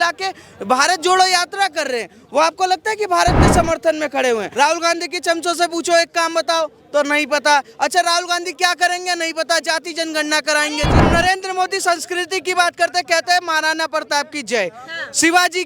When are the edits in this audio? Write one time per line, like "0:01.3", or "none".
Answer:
0:04.5
0:11.0